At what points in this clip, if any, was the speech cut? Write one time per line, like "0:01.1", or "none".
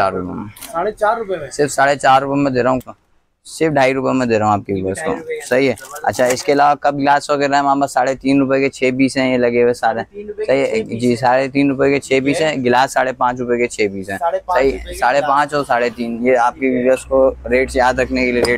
0:02.8